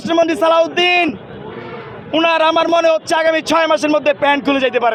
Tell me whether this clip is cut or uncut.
uncut